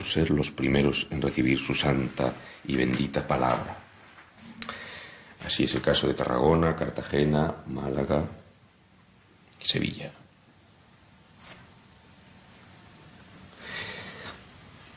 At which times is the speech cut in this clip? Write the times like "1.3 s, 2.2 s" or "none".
none